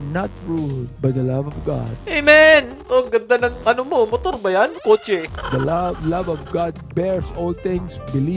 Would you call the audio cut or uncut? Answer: cut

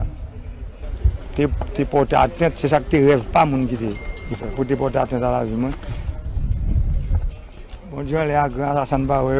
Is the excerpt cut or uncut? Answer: uncut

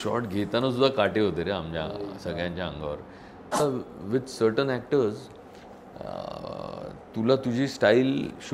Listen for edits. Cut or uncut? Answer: cut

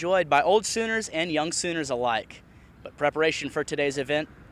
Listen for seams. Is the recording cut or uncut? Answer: uncut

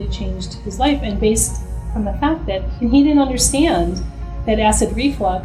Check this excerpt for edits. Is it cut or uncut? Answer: uncut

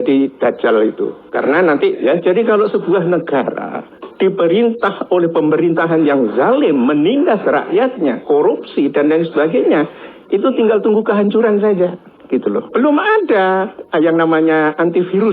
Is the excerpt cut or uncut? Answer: cut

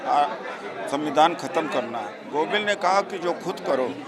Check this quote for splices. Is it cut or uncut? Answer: cut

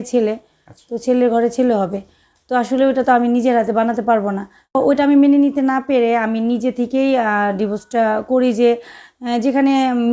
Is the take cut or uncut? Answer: cut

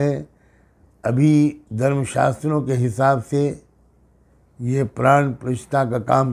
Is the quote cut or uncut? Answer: uncut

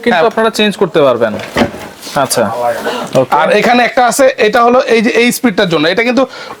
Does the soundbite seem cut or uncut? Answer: uncut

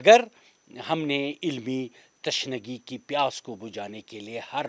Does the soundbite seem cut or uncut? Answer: uncut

